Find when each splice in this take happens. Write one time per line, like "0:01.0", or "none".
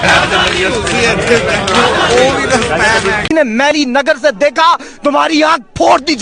0:03.2